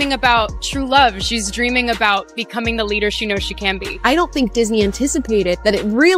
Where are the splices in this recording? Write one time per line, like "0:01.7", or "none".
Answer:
none